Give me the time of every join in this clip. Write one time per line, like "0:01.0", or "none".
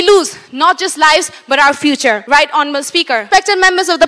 0:02.2
0:03.2